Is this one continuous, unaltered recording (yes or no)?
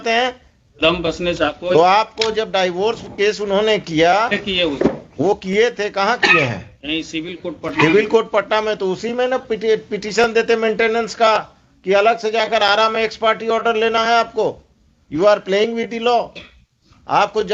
yes